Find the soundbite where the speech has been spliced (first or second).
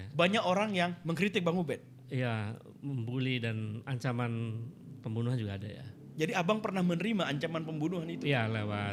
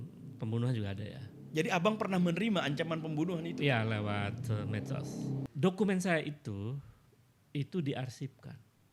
second